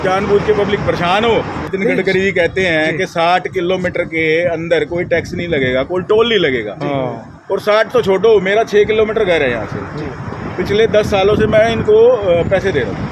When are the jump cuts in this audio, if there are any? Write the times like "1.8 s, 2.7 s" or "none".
1.6 s